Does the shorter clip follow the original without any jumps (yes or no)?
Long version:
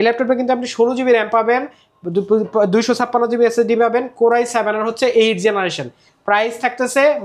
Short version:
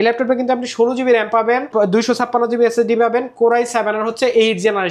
no